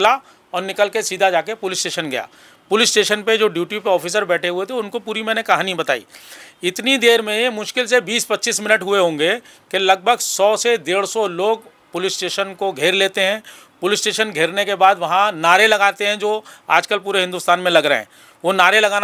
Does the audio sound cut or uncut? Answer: uncut